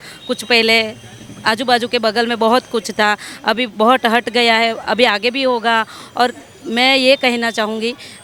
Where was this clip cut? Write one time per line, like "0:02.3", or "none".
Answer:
none